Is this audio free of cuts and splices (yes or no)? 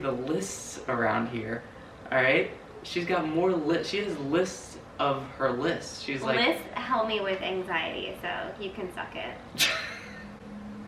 yes